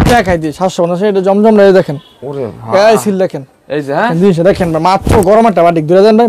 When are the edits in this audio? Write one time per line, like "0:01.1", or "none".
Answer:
0:04.1